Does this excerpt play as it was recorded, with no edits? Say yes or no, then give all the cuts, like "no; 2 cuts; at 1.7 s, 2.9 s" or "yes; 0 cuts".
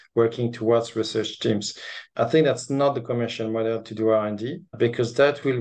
yes; 0 cuts